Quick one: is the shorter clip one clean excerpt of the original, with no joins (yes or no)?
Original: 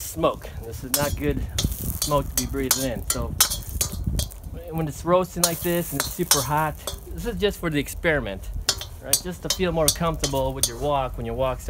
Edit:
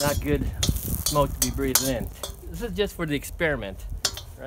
no